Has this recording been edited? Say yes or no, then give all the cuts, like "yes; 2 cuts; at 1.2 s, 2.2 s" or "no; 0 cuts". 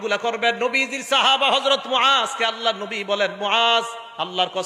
no; 0 cuts